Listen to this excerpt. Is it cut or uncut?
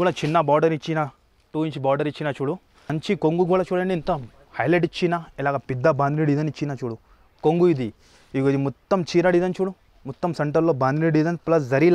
cut